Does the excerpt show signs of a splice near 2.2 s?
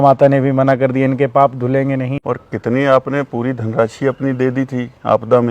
yes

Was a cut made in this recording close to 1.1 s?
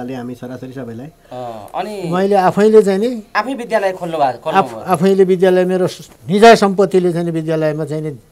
no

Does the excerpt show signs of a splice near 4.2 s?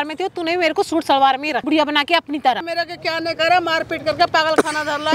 no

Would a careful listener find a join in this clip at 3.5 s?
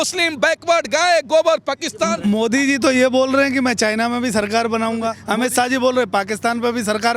no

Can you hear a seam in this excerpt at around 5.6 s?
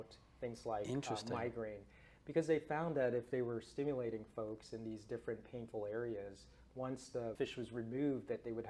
no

